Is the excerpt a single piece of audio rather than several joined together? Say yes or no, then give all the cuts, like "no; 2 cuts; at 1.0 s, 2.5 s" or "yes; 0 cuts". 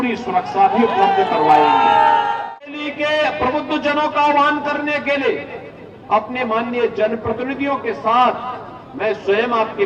no; 1 cut; at 2.6 s